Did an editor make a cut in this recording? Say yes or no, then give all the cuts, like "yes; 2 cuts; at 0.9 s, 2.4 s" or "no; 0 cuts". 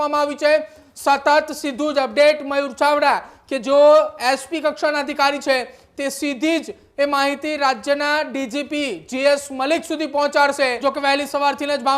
yes; 1 cut; at 10.8 s